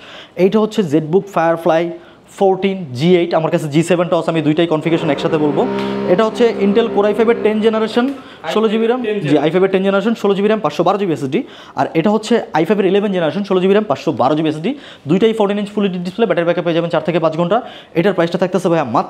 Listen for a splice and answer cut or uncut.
uncut